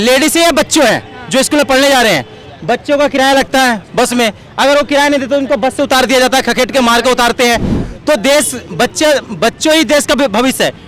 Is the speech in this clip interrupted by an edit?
no; 0 cuts

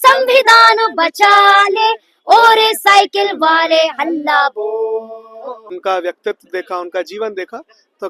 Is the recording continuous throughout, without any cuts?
no; 1 cut; at 5.7 s

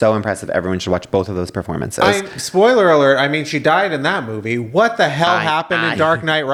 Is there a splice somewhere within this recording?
no; 0 cuts

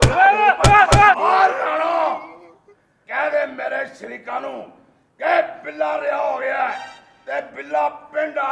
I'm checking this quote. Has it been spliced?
yes; 1 cut; at 1.2 s

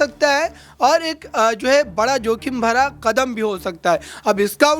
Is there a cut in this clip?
no; 0 cuts

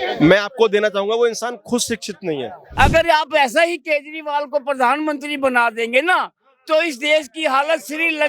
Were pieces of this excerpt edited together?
yes; 1 cut; at 2.6 s

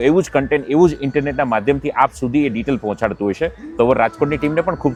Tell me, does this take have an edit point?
no; 0 cuts

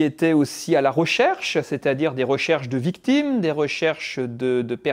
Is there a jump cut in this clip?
no; 0 cuts

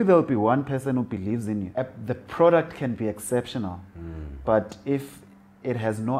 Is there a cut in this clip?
yes; 1 cut; at 1.7 s

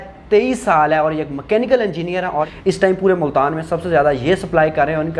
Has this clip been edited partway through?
yes; 1 cut; at 2.5 s

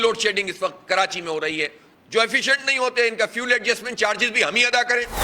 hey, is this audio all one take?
no; 1 cut; at 2.1 s

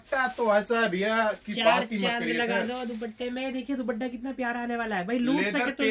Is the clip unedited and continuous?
yes; 0 cuts

